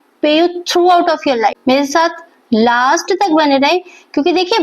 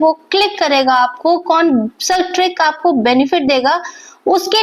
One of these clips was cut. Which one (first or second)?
first